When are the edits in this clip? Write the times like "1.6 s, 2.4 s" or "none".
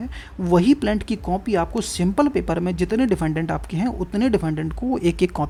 none